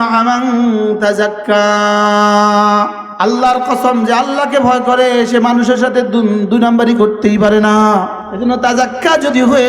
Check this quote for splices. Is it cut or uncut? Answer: cut